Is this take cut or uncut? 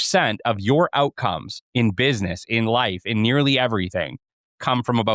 uncut